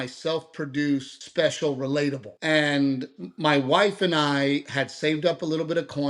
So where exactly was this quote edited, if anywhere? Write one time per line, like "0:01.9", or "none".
0:01.2
0:02.3